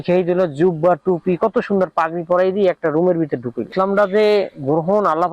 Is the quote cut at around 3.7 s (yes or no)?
yes